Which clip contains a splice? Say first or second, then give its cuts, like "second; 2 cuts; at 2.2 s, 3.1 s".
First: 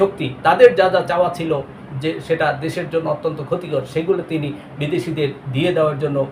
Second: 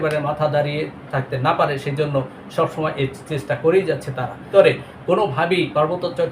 second; 1 cut; at 4.4 s